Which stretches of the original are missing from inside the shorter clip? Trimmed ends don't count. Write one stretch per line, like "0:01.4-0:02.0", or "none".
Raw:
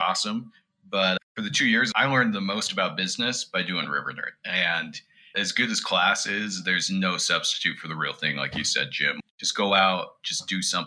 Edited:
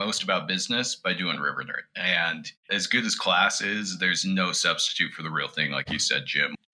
0:05.0-0:05.2